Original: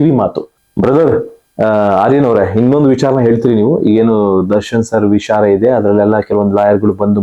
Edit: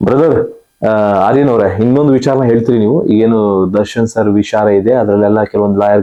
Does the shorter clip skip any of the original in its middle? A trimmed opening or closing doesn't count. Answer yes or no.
no